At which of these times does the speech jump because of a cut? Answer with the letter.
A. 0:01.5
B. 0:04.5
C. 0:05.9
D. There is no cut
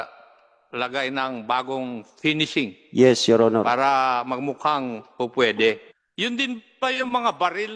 C